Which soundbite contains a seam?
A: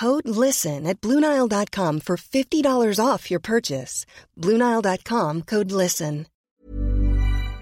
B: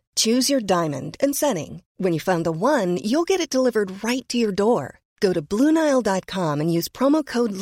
A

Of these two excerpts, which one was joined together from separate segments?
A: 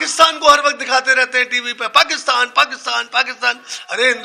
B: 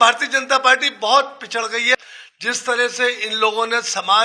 B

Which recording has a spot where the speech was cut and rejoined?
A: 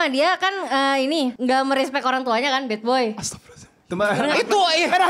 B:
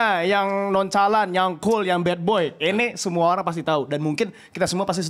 A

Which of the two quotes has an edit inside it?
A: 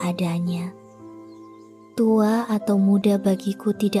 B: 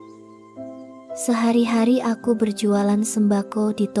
B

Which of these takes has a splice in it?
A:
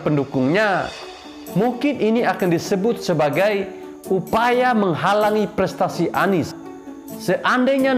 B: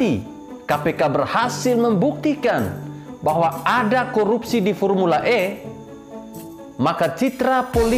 A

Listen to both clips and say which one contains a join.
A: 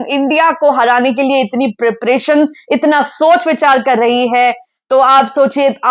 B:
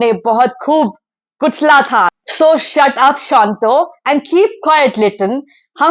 B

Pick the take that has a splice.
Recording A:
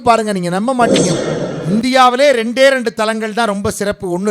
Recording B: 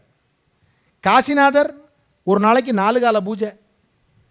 A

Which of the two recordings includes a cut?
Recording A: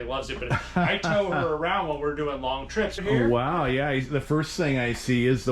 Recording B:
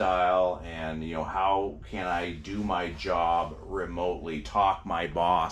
A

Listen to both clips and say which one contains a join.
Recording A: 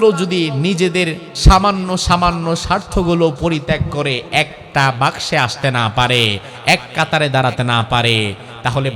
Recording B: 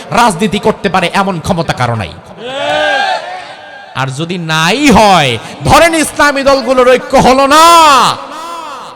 A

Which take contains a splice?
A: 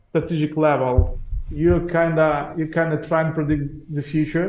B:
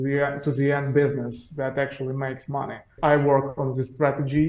B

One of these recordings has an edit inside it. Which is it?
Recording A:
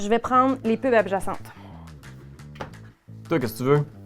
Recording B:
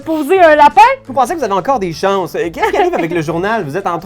B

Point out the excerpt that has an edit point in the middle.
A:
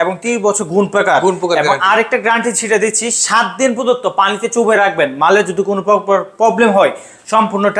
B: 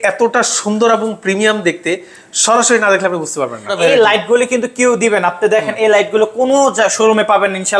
B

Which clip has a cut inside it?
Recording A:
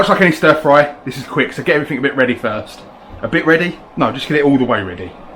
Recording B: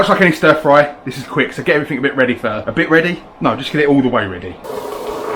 B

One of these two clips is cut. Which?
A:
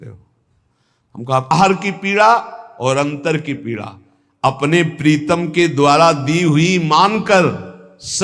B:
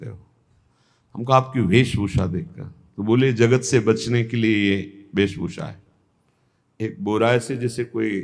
A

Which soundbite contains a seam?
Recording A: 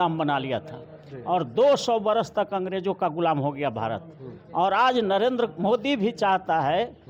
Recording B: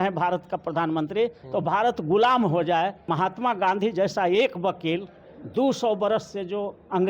B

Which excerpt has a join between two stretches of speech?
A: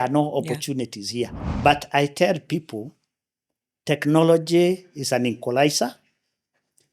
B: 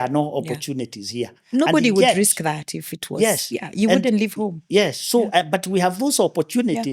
A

